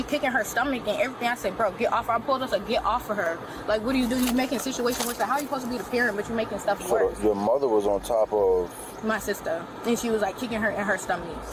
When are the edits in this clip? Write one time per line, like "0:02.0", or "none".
none